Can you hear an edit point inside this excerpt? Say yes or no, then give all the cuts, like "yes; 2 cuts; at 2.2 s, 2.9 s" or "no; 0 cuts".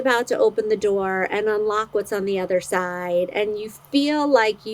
no; 0 cuts